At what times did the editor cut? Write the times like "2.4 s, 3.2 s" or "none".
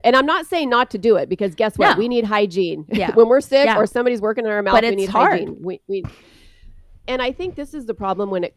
7.0 s